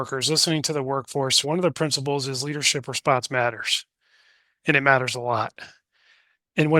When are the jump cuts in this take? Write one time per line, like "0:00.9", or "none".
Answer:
0:01.4